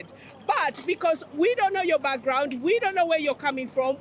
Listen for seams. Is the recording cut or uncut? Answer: uncut